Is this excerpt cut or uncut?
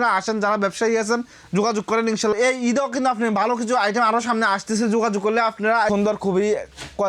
cut